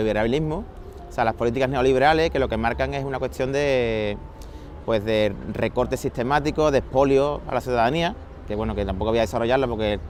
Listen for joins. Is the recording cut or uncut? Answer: uncut